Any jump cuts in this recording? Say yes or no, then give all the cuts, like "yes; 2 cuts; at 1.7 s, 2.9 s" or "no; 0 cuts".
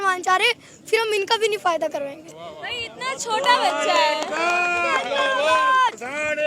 no; 0 cuts